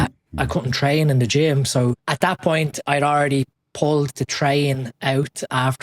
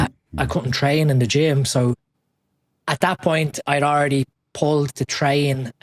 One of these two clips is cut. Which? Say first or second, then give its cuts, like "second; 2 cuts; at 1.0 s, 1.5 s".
first; 1 cut; at 2.1 s